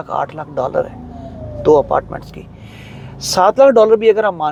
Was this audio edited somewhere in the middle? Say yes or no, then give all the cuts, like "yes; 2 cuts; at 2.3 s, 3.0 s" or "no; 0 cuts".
no; 0 cuts